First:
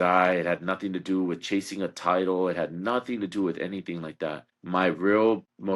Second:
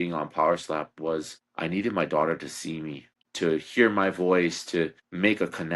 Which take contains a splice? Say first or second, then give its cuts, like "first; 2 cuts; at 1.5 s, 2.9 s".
second; 1 cut; at 3.2 s